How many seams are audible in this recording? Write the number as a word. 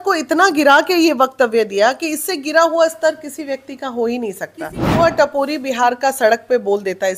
one